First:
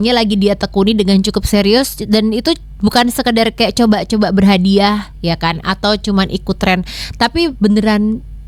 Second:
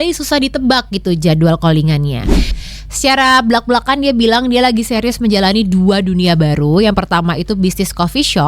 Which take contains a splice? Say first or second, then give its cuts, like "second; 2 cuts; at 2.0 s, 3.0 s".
second; 1 cut; at 2.5 s